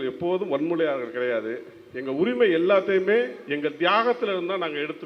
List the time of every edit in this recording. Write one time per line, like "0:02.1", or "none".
none